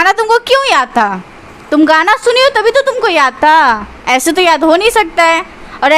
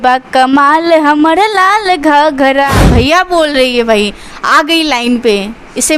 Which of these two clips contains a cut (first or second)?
second